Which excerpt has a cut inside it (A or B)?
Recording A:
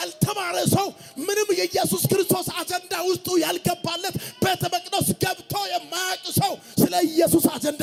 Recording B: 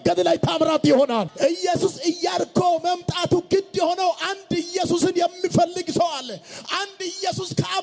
B